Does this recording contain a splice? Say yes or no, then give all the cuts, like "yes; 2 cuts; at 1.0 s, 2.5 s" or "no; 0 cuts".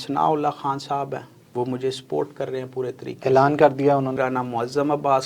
yes; 2 cuts; at 1.4 s, 4.2 s